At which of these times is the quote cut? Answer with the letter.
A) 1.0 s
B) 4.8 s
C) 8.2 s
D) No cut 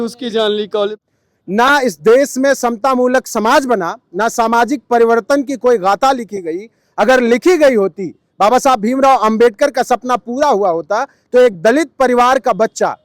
A